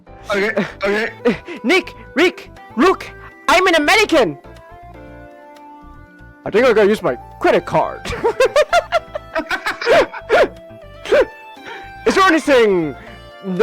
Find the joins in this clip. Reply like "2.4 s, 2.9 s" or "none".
8.1 s